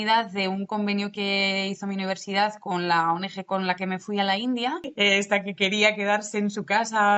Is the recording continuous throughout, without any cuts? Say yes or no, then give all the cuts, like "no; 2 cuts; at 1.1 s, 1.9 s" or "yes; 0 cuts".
no; 1 cut; at 4.9 s